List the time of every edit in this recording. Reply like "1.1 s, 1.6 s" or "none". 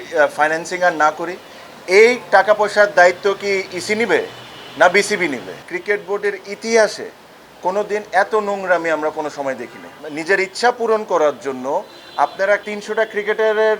5.6 s, 10.1 s, 12.6 s